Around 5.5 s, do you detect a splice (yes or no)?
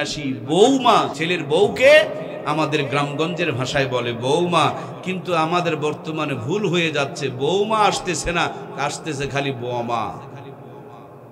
no